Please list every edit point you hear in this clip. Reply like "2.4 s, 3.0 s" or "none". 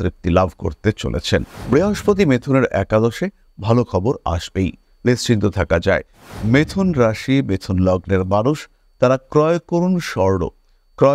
1.5 s, 6.2 s